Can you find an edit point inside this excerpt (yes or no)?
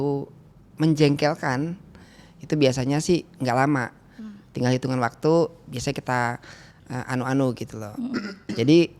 no